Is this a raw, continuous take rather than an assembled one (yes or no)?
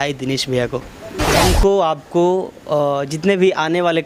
no